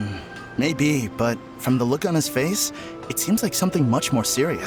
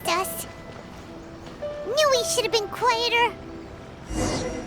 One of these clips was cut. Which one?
second; 1 cut; at 3.4 s

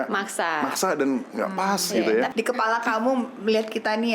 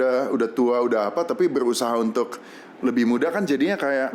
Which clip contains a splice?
first; 1 cut; at 2.3 s

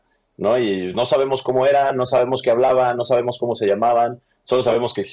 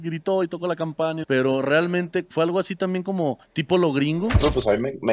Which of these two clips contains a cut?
second; 4 cuts; at 1.2 s, 2.3 s, 3.5 s, 4.4 s

